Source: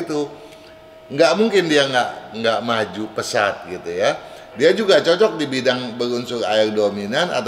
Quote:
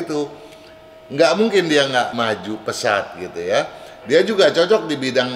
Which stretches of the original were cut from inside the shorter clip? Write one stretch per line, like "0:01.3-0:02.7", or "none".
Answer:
0:02.1-0:02.6